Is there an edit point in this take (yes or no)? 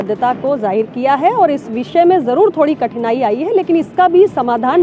no